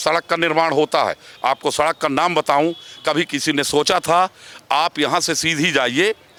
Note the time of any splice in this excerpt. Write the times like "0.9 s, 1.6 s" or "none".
none